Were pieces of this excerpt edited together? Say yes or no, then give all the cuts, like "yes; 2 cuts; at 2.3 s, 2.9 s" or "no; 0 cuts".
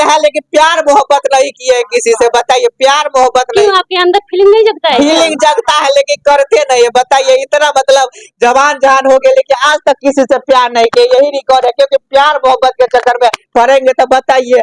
no; 0 cuts